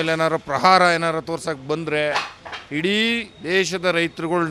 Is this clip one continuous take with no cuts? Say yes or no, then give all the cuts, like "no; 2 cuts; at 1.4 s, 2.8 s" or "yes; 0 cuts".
yes; 0 cuts